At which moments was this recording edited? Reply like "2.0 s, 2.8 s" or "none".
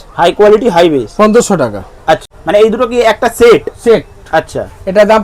2.3 s

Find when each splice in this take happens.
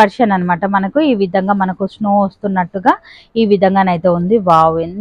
none

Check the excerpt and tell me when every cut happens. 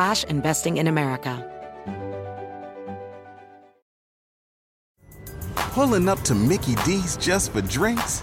1.4 s

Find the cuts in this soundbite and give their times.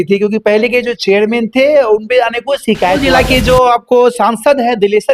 3.0 s

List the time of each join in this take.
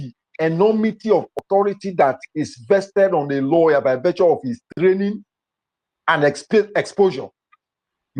none

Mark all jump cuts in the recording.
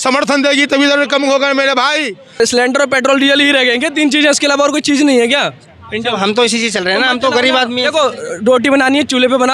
2.4 s

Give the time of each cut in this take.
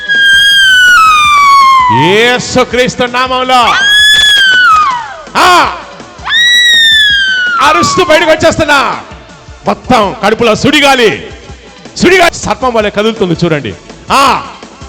12.3 s

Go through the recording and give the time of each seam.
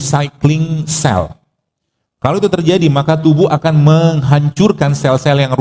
none

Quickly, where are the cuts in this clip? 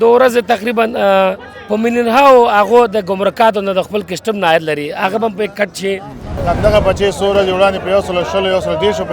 6.3 s

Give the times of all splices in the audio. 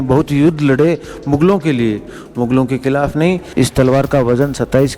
3.5 s

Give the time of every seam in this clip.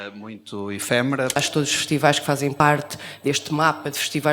1.4 s, 2.6 s

